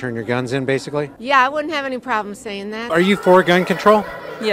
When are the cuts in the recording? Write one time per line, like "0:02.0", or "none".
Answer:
0:01.2
0:02.9